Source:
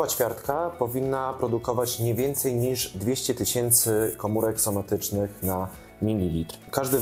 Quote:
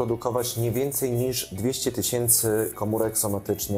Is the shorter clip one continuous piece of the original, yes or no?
yes